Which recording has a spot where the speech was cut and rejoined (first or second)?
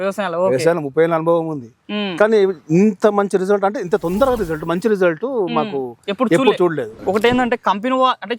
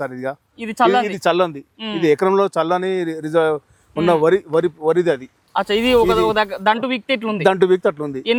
first